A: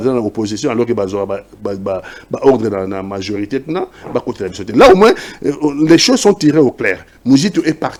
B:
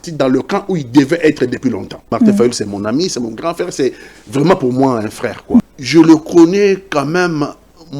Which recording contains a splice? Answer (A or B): B